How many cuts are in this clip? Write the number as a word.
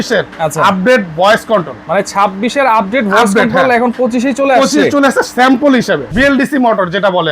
one